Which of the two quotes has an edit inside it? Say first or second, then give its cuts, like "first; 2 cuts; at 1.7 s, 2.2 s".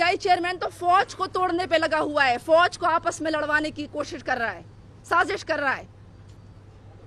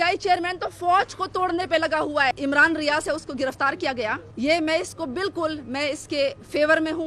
second; 2 cuts; at 2.4 s, 4.3 s